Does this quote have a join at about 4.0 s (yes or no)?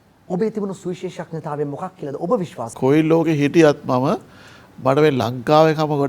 no